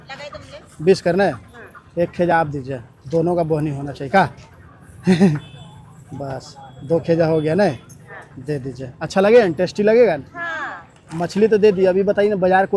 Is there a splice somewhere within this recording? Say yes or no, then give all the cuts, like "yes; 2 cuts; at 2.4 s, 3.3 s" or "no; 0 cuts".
no; 0 cuts